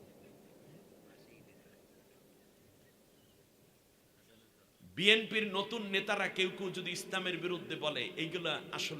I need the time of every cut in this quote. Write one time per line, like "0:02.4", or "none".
none